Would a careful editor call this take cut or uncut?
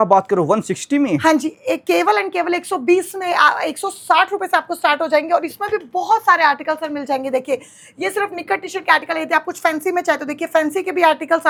uncut